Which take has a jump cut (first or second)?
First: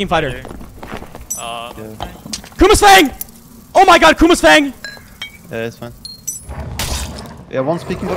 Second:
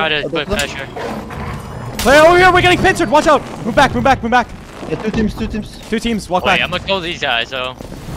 first